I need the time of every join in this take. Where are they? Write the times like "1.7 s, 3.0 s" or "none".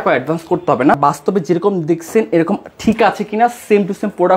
0.9 s